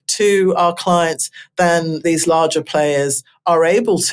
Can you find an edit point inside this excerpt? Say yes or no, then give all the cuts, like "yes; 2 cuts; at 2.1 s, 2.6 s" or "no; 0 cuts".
yes; 1 cut; at 2.0 s